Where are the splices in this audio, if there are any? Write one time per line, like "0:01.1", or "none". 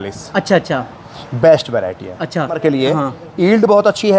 0:02.6

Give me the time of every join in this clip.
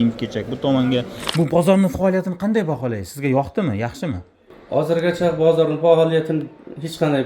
0:01.2

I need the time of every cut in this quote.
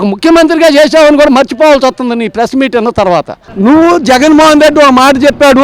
0:03.4

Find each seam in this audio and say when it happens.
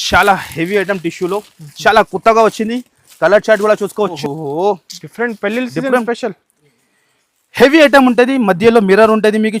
0:04.2

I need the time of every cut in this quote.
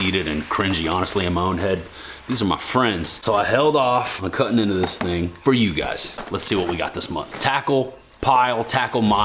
0:03.2
0:06.2

